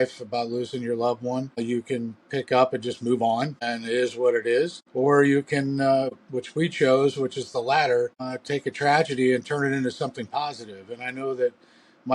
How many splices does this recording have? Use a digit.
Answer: 5